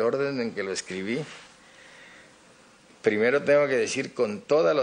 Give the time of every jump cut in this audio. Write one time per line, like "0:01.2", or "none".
none